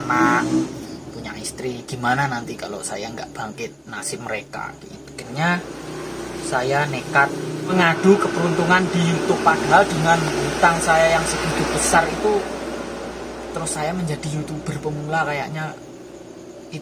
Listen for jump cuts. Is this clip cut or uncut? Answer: cut